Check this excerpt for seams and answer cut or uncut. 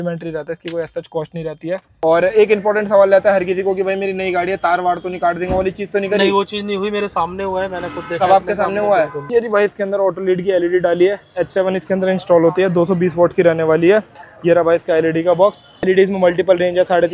cut